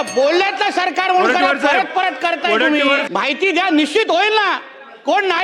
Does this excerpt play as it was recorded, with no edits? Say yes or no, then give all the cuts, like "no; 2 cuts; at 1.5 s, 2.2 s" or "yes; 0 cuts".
no; 1 cut; at 3.1 s